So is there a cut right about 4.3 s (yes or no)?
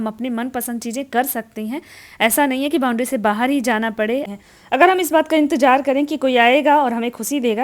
yes